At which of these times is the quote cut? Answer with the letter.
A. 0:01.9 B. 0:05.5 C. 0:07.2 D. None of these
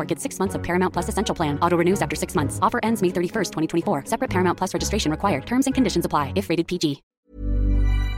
C